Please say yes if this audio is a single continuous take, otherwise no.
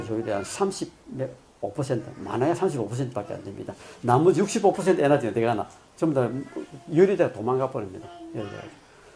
yes